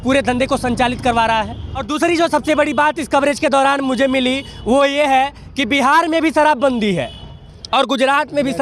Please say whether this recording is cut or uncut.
cut